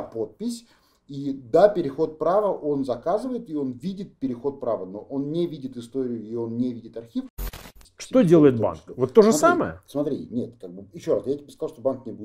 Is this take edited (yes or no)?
yes